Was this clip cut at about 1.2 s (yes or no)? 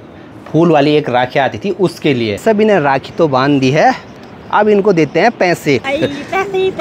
no